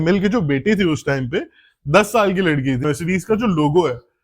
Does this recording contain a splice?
yes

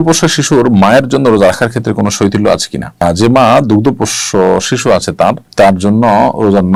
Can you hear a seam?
no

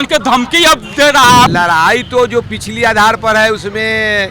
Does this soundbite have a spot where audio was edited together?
yes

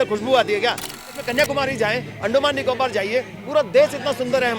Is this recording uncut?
no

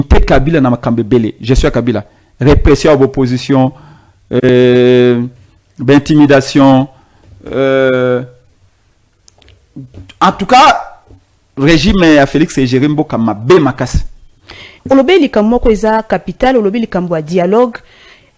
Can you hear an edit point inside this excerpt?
yes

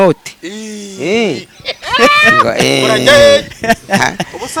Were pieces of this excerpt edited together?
no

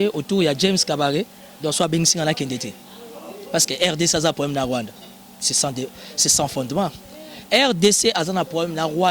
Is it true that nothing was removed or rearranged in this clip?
yes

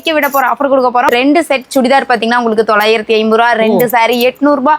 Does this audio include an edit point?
yes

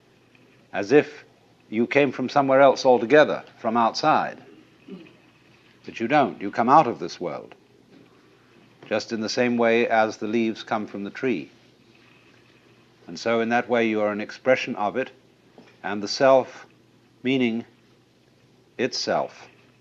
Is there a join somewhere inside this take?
no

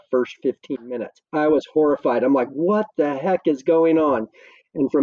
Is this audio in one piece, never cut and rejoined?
yes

